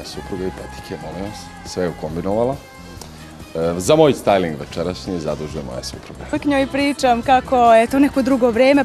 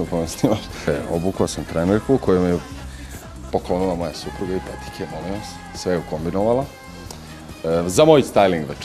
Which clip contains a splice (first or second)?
first